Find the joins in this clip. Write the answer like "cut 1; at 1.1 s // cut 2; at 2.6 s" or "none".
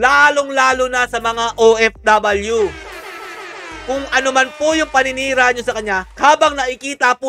none